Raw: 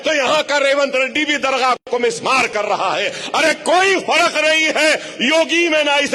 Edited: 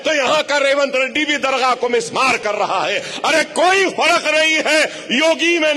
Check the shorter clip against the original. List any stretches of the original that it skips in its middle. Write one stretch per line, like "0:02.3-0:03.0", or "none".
0:01.8-0:01.9